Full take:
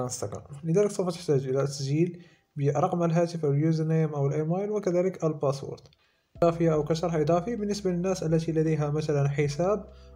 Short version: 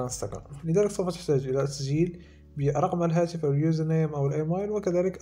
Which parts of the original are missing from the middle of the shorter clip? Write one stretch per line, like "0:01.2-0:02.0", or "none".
none